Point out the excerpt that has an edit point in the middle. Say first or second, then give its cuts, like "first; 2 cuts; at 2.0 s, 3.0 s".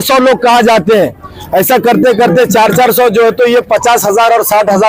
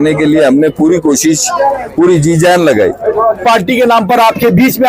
second; 1 cut; at 3.4 s